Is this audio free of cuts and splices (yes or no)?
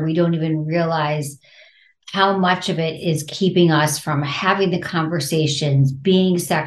yes